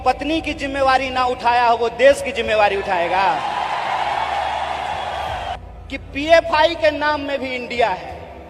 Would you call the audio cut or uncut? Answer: cut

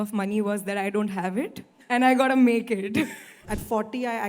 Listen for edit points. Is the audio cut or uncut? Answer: cut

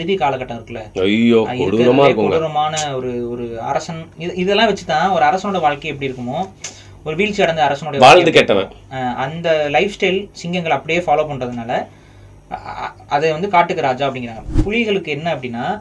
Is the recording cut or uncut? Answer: cut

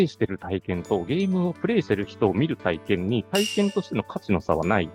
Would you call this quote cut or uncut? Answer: uncut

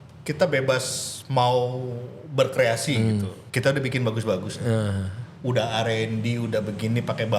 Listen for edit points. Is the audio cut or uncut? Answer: cut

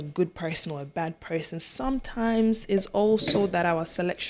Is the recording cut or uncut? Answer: uncut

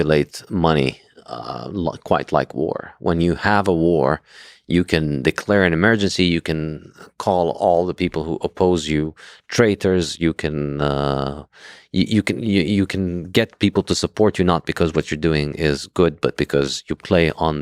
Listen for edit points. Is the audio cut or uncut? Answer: uncut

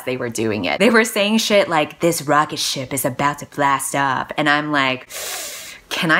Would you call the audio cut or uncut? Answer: uncut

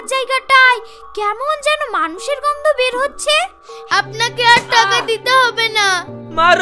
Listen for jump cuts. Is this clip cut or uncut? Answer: cut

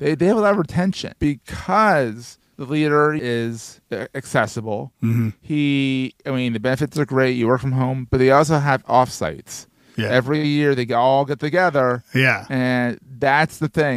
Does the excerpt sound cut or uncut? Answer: cut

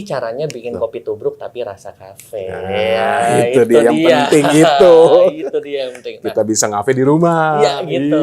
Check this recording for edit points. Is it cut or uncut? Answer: uncut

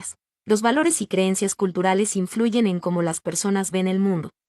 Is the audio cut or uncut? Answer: uncut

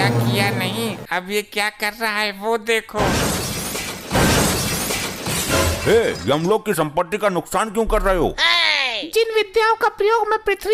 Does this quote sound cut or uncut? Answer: uncut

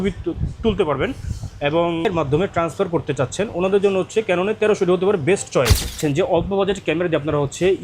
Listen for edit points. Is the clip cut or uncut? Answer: cut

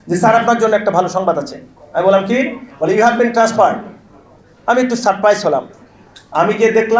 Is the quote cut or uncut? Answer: uncut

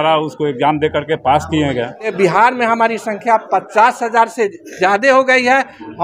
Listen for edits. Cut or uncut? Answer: cut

